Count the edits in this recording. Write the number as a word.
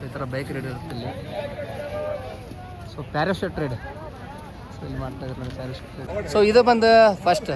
one